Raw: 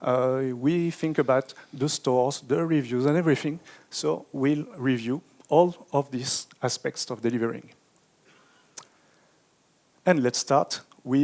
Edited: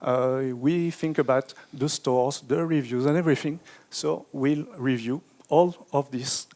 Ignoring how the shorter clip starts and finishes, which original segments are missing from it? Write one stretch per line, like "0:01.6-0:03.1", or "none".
none